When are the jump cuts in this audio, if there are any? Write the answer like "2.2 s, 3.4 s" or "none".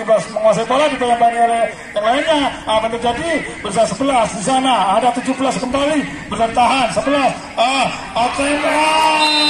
none